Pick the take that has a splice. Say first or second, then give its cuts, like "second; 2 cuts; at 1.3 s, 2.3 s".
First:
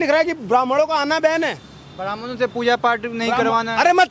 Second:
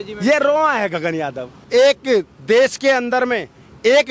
second; 1 cut; at 1.6 s